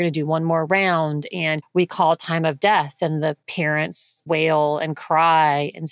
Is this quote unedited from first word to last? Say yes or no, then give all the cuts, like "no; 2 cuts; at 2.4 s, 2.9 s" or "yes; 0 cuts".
no; 2 cuts; at 1.6 s, 3.8 s